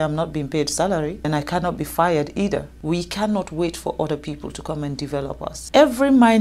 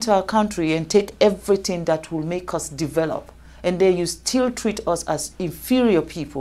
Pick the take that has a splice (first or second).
first